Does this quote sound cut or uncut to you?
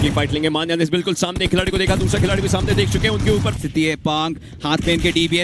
cut